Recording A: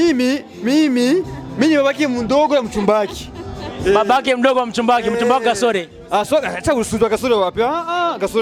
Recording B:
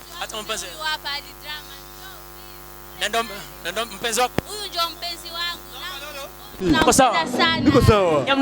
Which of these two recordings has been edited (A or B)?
B